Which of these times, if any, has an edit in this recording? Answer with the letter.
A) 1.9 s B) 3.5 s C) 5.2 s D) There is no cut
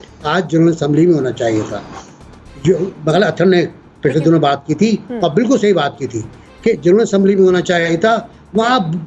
D